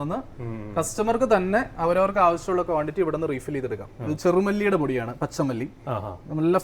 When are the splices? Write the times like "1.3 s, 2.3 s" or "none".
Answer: 3.9 s